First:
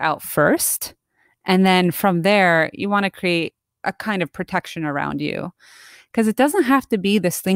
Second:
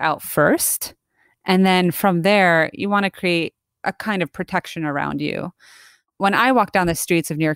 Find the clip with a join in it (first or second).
first